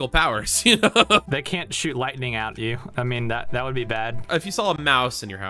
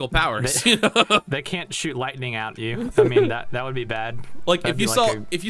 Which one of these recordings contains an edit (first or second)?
first